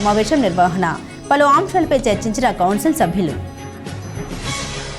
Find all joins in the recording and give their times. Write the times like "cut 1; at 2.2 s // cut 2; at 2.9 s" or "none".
cut 1; at 3.4 s